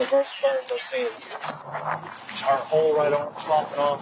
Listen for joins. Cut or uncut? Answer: uncut